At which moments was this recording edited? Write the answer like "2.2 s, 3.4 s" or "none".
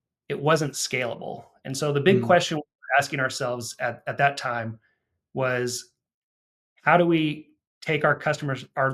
none

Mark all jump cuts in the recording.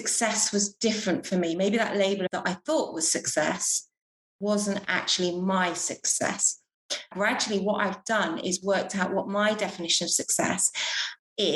2.3 s, 7.1 s

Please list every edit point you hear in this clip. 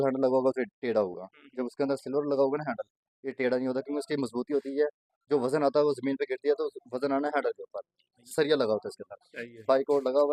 none

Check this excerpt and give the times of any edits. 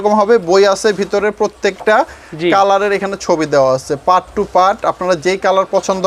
none

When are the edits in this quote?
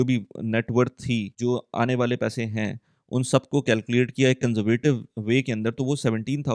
1.3 s

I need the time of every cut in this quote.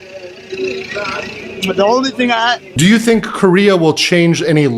2.6 s

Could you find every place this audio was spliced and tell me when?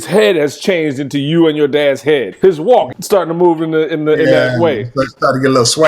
2.3 s, 3.0 s

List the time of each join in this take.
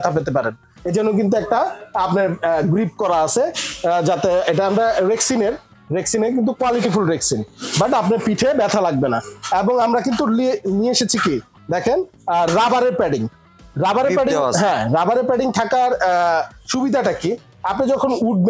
none

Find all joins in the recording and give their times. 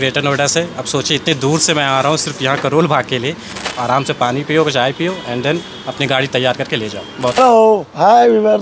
3.6 s, 7.4 s

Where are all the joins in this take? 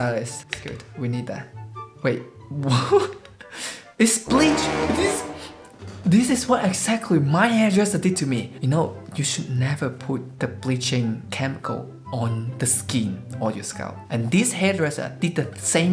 none

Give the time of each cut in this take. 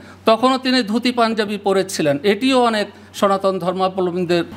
none

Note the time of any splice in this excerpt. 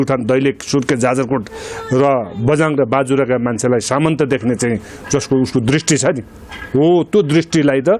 none

